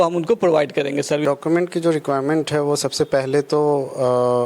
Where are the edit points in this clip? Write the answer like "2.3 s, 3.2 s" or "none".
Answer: 1.2 s